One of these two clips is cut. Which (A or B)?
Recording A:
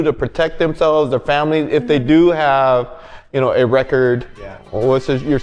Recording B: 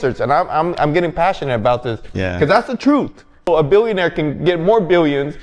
B